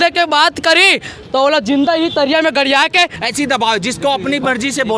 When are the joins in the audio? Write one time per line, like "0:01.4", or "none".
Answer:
0:03.2